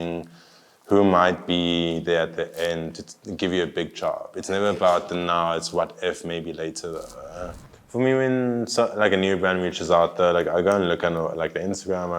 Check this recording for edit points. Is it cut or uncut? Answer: cut